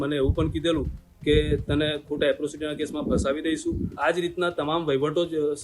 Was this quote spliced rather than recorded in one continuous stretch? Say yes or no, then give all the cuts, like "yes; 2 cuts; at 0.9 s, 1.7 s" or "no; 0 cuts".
yes; 1 cut; at 3.9 s